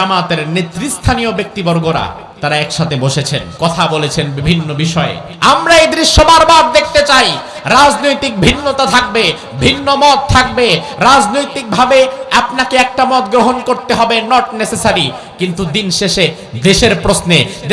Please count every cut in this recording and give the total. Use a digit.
3